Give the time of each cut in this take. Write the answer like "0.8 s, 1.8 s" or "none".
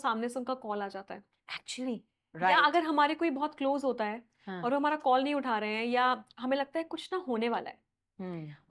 none